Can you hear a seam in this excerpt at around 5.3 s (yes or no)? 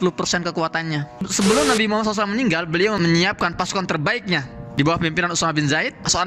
no